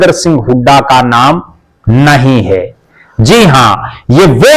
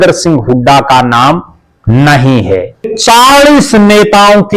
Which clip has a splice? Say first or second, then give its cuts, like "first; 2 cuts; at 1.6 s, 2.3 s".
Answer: second; 1 cut; at 2.9 s